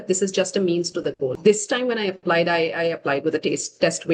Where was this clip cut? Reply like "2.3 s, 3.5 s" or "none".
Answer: 1.3 s

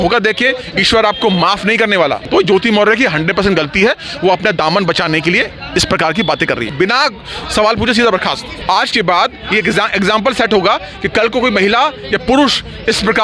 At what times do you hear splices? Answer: 2.2 s, 6.7 s, 8.5 s

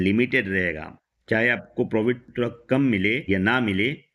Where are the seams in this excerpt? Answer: 2.3 s, 3.2 s

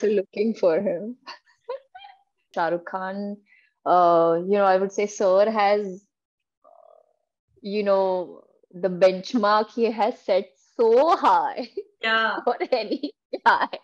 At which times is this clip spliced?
2.5 s

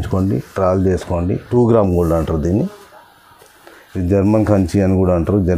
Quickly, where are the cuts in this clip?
1.5 s

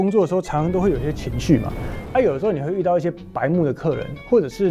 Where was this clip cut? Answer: none

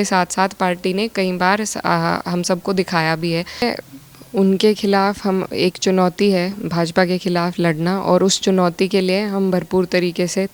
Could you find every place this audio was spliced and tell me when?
3.6 s

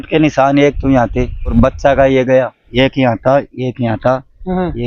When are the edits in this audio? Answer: 1.5 s, 2.6 s

